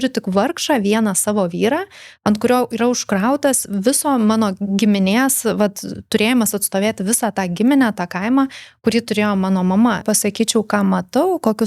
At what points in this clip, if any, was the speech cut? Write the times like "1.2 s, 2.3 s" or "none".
10.0 s

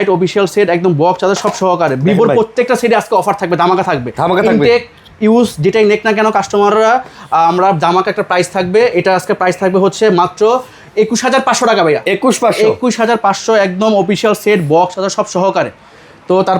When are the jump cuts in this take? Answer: none

